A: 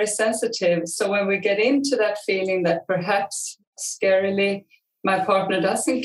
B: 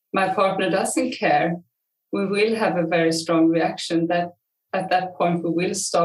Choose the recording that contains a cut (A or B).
A